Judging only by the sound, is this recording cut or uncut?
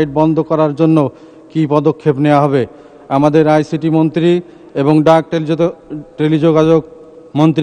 uncut